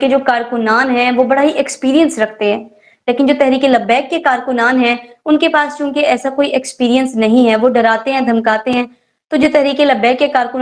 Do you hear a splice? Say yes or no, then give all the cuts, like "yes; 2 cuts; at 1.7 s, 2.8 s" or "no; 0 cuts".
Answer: no; 0 cuts